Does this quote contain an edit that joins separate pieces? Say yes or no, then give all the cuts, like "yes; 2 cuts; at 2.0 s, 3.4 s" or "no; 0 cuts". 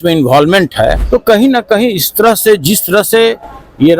yes; 1 cut; at 1.0 s